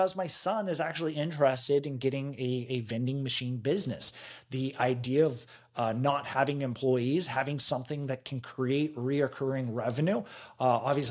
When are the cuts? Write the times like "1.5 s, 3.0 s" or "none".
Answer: none